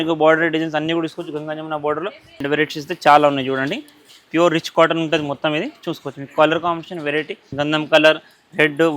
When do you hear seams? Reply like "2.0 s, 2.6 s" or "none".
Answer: 2.2 s, 7.5 s